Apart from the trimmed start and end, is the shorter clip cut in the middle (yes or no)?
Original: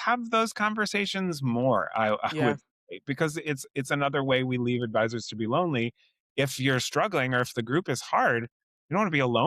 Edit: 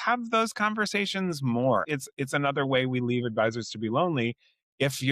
yes